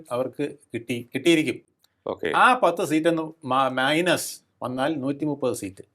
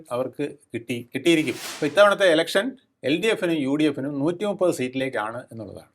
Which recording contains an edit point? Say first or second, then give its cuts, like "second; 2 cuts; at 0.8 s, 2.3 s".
second; 1 cut; at 1.7 s